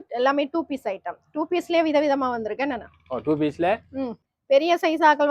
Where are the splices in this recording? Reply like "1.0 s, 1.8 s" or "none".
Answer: 4.2 s